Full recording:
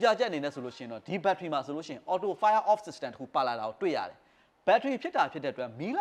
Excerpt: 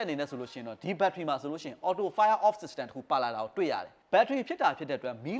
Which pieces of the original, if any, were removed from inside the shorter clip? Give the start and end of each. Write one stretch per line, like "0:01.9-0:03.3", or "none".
0:04.2-0:04.5